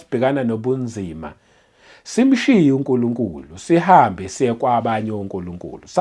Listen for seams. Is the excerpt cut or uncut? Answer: uncut